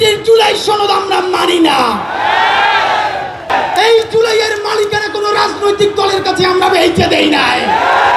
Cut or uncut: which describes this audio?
cut